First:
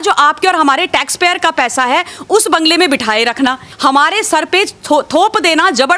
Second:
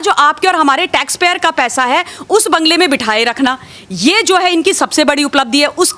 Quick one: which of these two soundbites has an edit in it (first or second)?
first